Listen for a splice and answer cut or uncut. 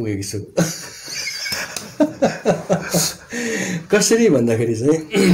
uncut